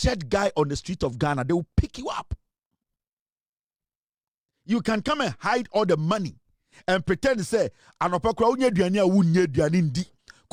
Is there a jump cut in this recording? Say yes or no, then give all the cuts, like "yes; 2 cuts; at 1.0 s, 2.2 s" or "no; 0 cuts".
no; 0 cuts